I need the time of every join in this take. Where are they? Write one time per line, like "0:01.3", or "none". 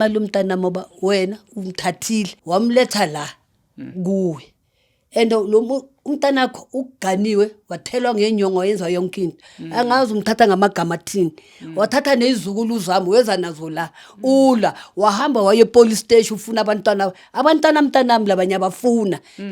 0:02.4